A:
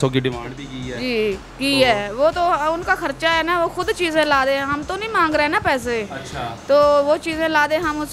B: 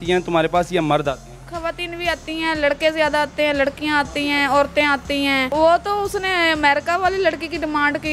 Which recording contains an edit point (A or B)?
B